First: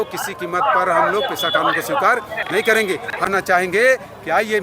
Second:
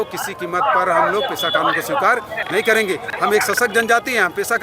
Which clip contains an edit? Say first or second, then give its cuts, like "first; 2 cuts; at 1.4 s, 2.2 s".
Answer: first; 1 cut; at 3.3 s